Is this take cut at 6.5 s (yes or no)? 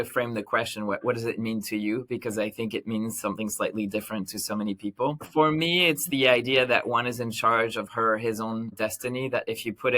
no